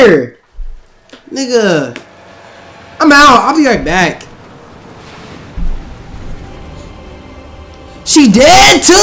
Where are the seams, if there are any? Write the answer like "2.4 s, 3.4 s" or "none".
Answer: none